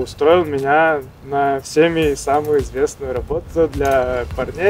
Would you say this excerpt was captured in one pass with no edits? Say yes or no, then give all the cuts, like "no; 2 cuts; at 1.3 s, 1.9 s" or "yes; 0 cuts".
yes; 0 cuts